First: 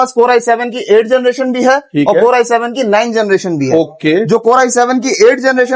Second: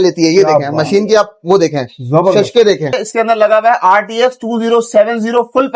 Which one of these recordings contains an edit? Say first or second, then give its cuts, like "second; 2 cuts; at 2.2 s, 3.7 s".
second; 1 cut; at 3.0 s